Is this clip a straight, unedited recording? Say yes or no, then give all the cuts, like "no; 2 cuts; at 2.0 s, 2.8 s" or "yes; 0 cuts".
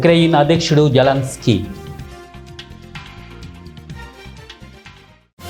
yes; 0 cuts